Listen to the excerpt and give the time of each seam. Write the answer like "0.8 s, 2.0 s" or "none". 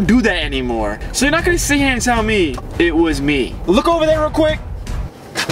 1.0 s, 2.6 s, 3.6 s